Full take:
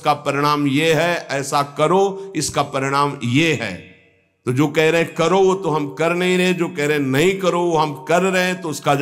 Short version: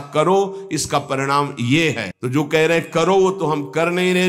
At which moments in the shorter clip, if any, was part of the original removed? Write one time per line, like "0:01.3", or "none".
0:02.1